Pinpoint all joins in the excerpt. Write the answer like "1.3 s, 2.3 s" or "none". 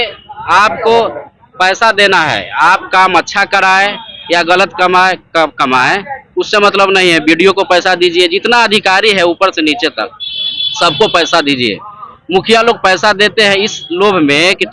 none

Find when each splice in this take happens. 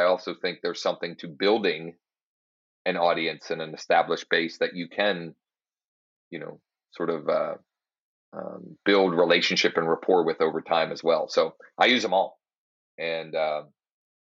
none

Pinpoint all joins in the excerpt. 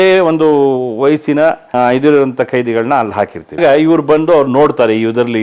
1.6 s, 3.6 s

